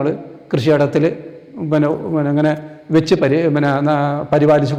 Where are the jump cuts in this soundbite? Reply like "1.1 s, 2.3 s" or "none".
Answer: none

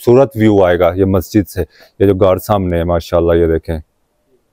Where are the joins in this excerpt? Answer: none

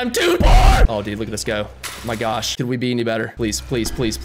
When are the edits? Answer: 0.9 s, 2.5 s, 3.3 s

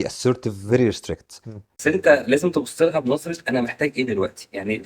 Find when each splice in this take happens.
1.8 s

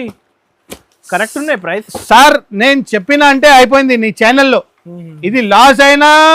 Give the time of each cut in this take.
none

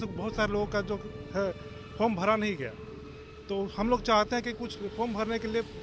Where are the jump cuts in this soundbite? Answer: none

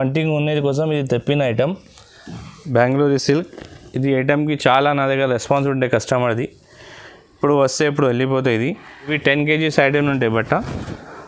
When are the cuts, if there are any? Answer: 2.5 s, 9.1 s

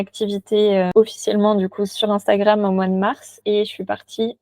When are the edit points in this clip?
0.9 s, 1.9 s

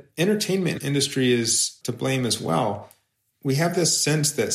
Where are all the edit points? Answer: 0.8 s, 1.8 s

